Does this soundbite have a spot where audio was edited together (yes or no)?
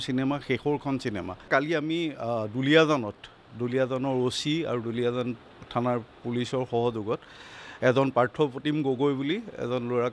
yes